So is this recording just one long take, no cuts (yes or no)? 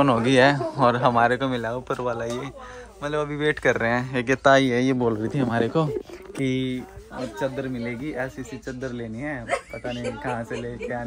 yes